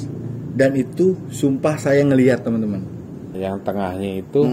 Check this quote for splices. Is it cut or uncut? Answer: cut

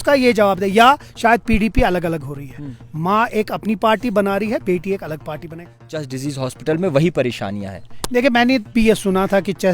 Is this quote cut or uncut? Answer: cut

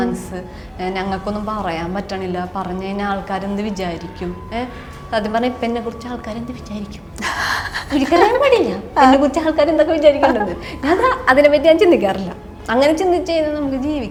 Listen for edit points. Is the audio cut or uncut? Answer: uncut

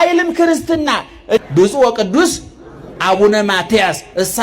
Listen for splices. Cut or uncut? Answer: cut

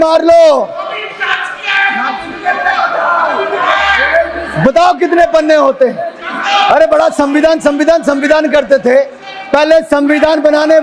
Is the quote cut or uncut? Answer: uncut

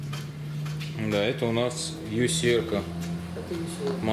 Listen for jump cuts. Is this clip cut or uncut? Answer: uncut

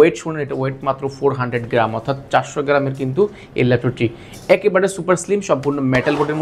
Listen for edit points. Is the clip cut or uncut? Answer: uncut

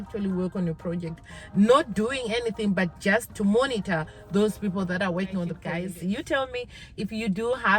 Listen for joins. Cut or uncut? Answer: cut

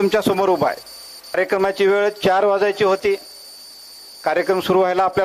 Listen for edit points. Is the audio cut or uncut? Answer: cut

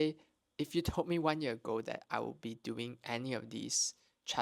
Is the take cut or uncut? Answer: uncut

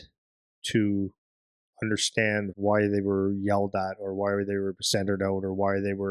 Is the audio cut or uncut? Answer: cut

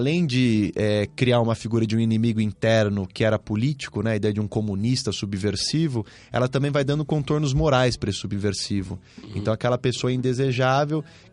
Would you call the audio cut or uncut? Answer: uncut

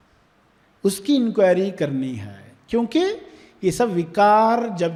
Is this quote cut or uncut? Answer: uncut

